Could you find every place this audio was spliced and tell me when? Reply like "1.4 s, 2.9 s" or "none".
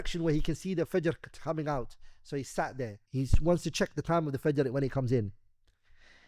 3.0 s